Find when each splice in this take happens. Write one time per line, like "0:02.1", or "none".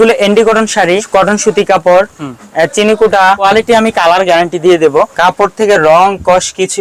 0:01.0
0:03.4
0:05.1